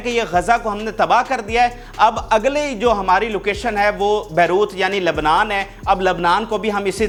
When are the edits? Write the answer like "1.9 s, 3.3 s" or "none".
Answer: none